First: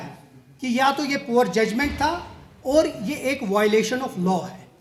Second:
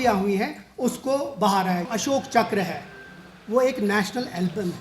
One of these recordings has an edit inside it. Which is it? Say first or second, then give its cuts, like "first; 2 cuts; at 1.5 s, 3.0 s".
second; 1 cut; at 1.9 s